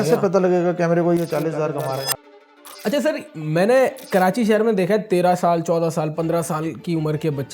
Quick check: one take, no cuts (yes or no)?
no